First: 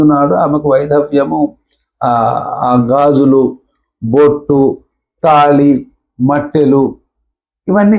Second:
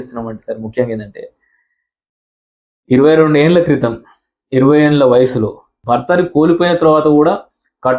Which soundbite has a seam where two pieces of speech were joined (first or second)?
second